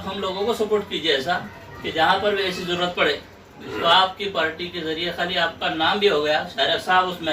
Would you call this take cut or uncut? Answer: uncut